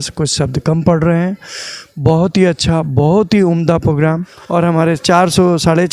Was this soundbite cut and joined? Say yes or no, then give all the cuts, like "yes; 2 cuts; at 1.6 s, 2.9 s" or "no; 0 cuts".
yes; 1 cut; at 4.3 s